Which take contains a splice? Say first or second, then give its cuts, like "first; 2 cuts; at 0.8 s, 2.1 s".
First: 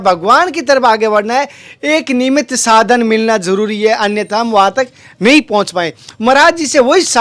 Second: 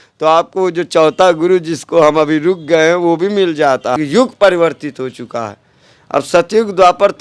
second; 1 cut; at 4.0 s